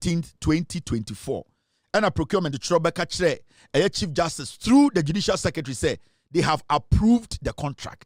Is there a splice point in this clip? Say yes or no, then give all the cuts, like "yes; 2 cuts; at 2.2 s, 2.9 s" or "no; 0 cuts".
no; 0 cuts